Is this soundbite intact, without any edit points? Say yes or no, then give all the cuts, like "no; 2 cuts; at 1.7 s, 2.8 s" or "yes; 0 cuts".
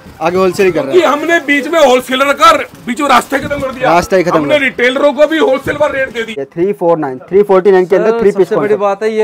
no; 1 cut; at 6.4 s